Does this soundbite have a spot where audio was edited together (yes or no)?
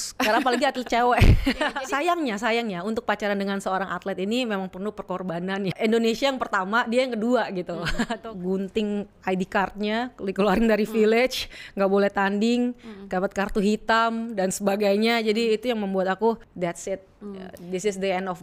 yes